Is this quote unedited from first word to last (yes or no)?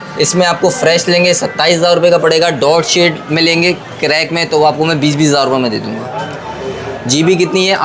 yes